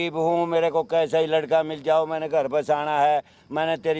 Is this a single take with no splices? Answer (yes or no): yes